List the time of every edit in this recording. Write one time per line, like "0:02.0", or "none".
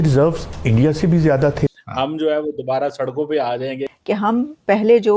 0:01.7
0:03.9